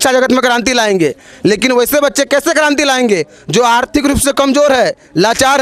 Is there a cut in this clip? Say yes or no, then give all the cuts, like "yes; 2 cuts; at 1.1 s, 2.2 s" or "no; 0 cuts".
no; 0 cuts